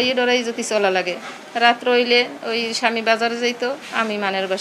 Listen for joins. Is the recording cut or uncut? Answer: uncut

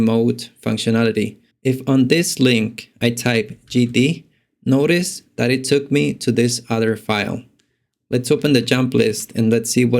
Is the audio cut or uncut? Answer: cut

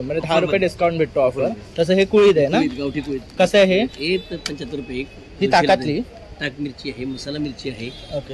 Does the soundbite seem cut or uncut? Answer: uncut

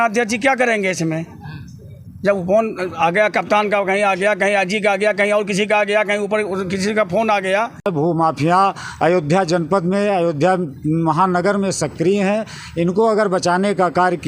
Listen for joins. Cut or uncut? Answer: cut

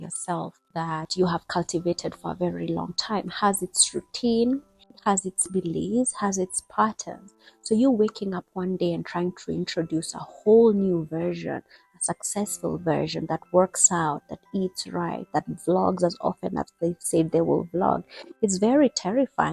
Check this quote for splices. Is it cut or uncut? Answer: cut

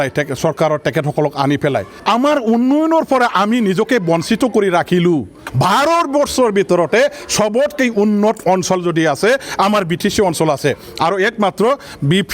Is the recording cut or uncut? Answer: cut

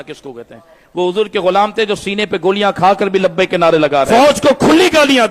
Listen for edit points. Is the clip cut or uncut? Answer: cut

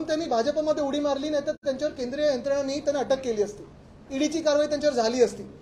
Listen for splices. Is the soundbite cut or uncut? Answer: uncut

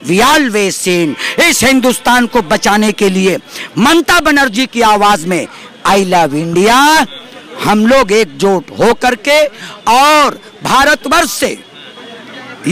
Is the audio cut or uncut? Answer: uncut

